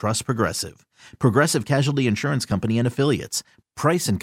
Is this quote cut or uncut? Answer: uncut